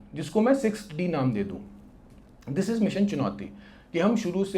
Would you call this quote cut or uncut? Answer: uncut